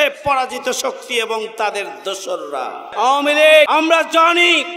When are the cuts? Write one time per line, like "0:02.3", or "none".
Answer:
0:02.9
0:03.7